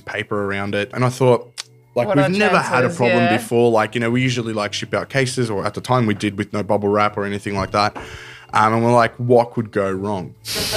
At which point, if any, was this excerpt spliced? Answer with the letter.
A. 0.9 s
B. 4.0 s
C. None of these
A